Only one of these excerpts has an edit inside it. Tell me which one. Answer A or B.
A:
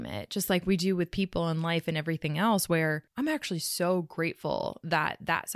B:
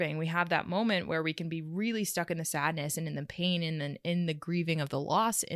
A